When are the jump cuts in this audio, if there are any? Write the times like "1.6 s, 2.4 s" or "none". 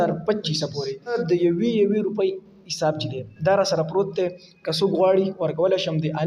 1.2 s